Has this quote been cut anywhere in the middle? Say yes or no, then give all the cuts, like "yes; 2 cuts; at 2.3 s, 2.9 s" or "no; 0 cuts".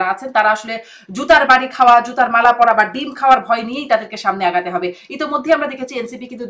no; 0 cuts